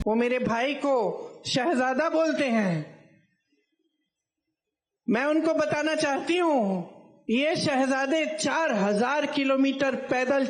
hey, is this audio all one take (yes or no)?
yes